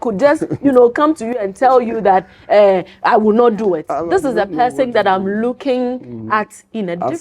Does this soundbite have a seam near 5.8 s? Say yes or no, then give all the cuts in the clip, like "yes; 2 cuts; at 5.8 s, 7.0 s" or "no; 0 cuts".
no; 1 cut; at 3.9 s